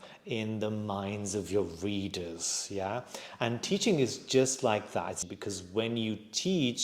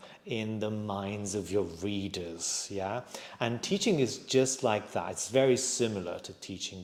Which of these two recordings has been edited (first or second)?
first